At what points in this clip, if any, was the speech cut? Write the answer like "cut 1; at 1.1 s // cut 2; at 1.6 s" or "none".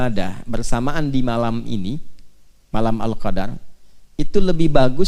none